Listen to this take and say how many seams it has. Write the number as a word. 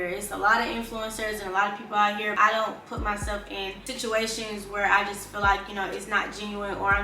two